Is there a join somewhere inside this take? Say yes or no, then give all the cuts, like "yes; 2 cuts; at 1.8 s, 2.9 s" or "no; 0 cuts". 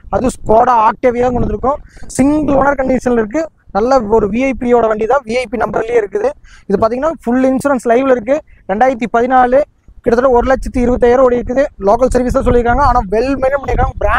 no; 0 cuts